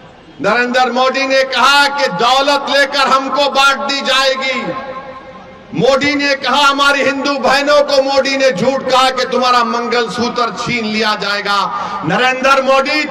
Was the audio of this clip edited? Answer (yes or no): no